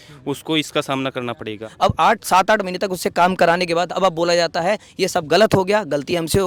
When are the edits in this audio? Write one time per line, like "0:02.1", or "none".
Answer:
0:01.6